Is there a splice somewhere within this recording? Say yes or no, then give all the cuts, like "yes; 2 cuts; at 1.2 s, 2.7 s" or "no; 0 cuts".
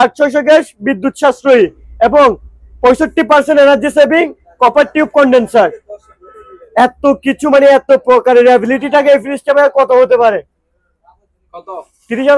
no; 0 cuts